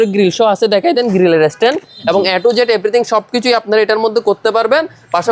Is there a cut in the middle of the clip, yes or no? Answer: no